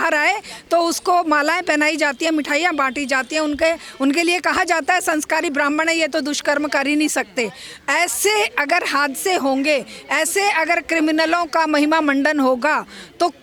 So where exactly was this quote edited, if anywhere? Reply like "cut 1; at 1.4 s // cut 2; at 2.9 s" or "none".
none